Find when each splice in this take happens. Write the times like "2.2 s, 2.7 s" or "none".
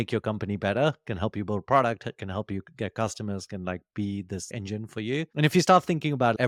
none